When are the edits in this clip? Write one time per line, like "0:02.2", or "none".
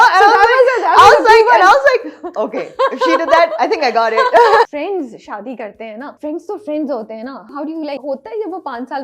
0:04.7
0:06.1
0:07.5

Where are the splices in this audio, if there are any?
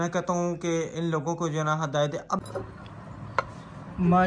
0:02.4

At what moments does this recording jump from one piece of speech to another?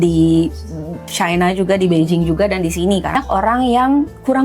0:03.2

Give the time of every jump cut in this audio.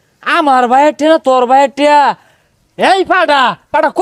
none

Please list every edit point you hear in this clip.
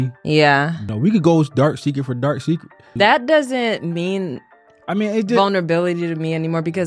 0:00.8
0:02.8

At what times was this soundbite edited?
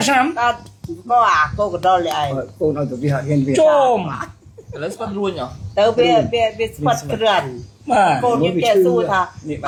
none

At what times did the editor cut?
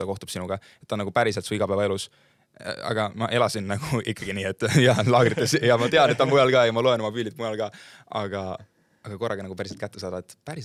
none

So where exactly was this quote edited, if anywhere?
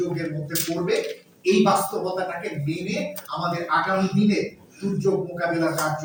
none

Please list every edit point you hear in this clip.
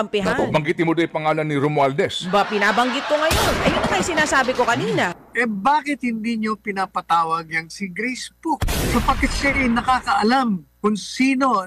0:05.2
0:08.9

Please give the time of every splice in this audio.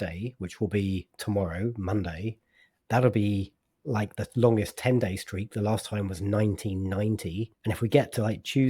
0:04.1
0:07.5

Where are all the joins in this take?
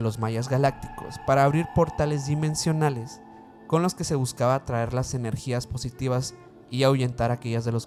none

